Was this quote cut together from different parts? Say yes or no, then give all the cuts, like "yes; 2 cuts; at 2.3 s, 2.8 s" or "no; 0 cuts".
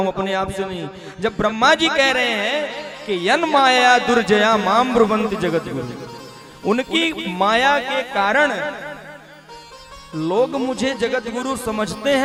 no; 0 cuts